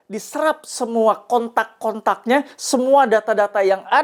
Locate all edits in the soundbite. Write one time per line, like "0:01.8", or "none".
none